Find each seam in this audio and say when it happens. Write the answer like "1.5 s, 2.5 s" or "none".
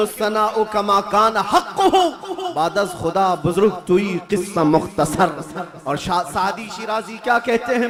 none